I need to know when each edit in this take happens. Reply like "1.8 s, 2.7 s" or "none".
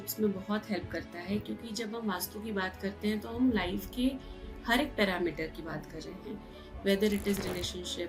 none